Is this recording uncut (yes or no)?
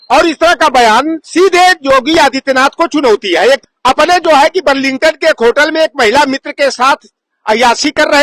no